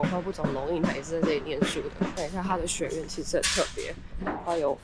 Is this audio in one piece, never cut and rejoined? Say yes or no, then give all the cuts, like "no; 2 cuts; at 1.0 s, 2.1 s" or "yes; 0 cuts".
yes; 0 cuts